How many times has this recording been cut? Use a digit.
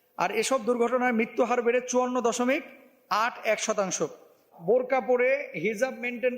1